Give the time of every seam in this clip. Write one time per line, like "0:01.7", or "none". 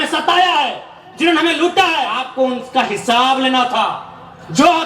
0:02.2